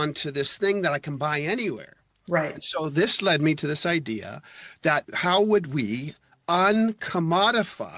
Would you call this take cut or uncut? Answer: uncut